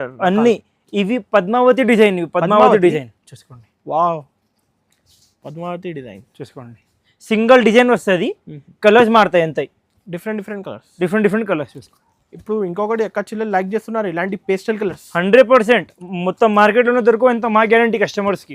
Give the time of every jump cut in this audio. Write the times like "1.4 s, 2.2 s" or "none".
none